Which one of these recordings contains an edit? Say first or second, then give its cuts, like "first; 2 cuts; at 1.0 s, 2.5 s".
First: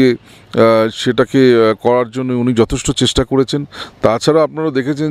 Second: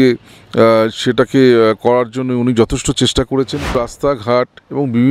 second; 1 cut; at 3.9 s